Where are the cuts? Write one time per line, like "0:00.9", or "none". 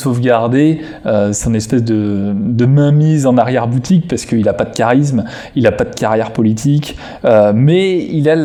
none